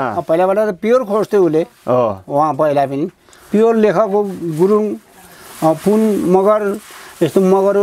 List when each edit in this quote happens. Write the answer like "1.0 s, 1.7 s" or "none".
none